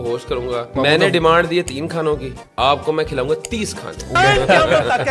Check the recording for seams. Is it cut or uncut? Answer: cut